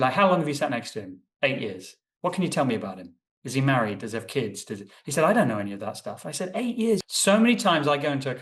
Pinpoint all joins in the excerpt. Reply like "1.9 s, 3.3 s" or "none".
7.1 s

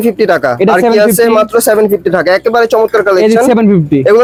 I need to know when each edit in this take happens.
none

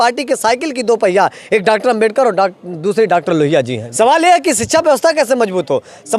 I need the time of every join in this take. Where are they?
3.8 s

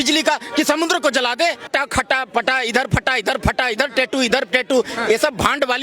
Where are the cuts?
1.6 s

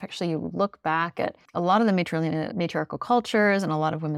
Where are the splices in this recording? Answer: 1.4 s, 2.5 s

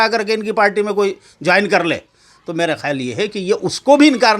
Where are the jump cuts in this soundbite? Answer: none

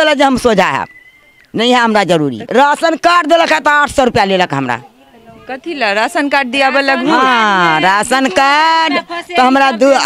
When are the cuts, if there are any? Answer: 2.4 s

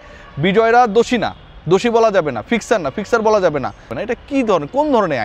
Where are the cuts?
3.8 s

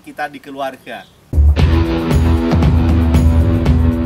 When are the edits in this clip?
1.2 s

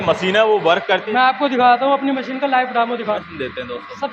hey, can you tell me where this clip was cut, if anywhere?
1.1 s, 3.2 s

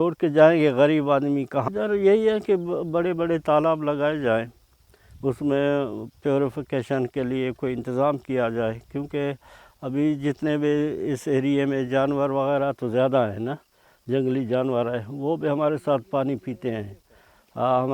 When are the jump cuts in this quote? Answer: 1.6 s

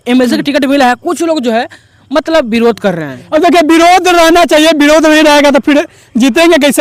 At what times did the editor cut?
none

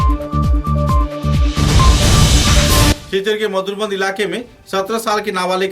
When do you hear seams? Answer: 3.0 s

